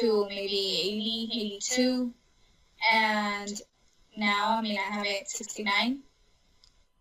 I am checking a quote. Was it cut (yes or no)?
no